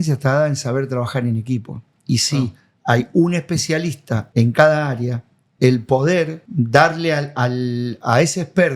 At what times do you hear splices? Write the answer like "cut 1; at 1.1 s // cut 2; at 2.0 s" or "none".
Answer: cut 1; at 4.1 s // cut 2; at 6.4 s